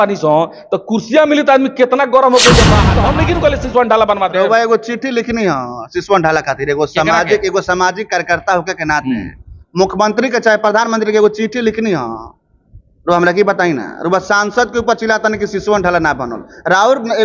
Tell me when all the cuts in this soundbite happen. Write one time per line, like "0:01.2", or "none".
0:03.0